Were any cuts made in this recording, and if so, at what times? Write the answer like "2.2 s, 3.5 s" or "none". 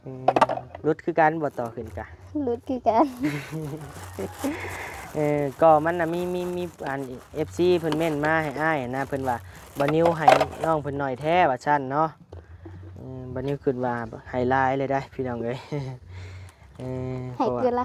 none